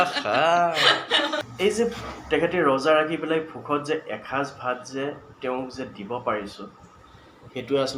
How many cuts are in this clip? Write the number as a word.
one